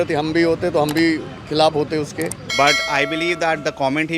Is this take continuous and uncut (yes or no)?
no